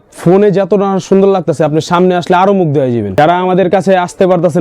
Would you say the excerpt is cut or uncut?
cut